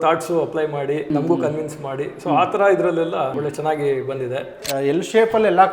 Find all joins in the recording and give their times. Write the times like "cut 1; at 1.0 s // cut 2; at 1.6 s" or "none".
cut 1; at 1.1 s // cut 2; at 3.4 s // cut 3; at 4.6 s